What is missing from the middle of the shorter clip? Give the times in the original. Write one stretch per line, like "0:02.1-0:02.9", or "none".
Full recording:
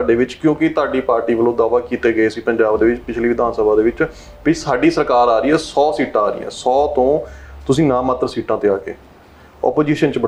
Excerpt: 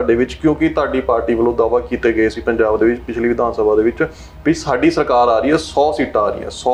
none